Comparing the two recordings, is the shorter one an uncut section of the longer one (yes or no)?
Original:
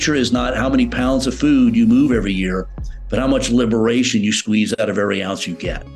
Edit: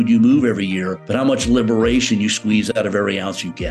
no